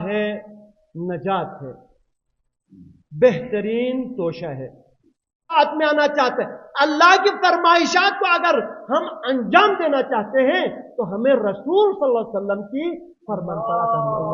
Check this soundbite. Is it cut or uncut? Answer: cut